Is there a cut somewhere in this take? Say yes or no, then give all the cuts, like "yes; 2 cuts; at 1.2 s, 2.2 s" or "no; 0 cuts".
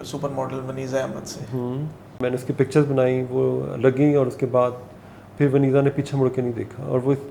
yes; 1 cut; at 2.2 s